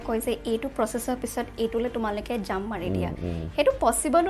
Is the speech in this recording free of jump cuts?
yes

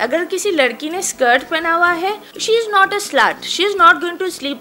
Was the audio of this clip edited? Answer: no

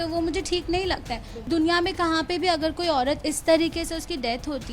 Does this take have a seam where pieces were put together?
yes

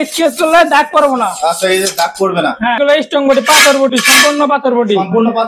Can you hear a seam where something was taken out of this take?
yes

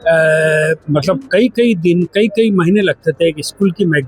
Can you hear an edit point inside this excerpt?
no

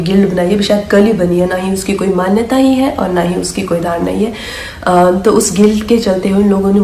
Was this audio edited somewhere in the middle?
yes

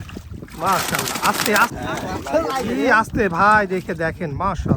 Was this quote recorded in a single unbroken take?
no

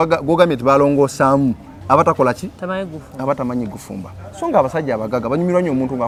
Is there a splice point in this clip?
no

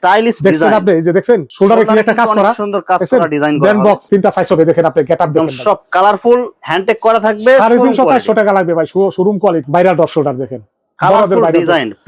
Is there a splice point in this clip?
yes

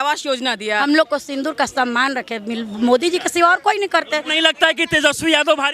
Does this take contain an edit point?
yes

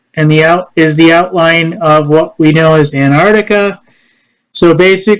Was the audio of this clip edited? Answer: yes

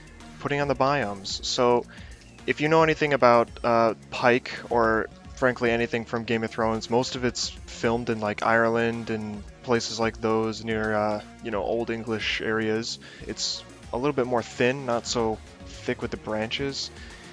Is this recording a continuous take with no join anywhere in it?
yes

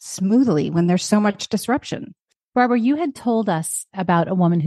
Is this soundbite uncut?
no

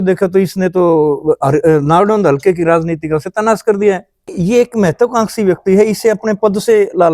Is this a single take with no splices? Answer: no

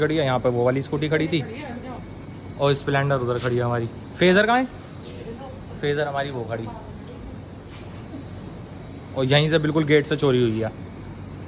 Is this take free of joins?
yes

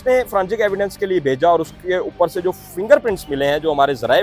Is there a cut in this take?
no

